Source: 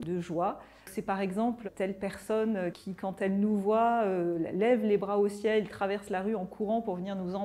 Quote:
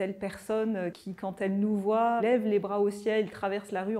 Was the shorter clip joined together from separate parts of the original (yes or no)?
yes